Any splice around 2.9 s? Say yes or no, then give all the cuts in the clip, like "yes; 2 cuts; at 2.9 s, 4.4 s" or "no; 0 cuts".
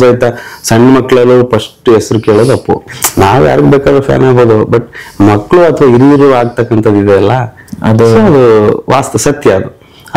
yes; 1 cut; at 2.9 s